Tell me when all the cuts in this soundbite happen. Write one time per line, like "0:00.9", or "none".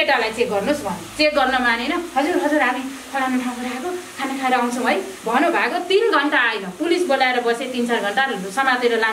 none